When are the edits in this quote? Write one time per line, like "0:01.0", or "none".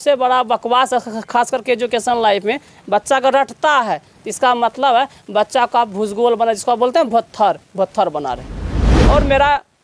0:08.9